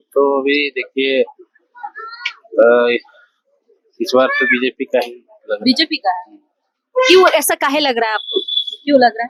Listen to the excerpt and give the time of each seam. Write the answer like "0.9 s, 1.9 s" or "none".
none